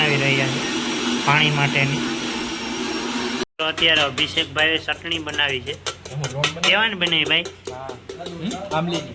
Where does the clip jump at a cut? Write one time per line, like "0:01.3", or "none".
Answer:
0:03.4